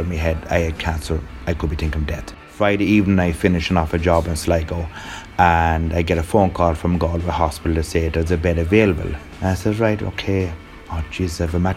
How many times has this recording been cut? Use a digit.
1